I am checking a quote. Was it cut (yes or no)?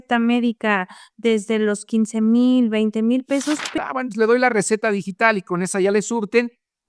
yes